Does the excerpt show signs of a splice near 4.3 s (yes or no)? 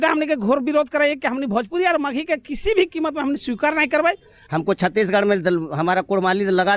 yes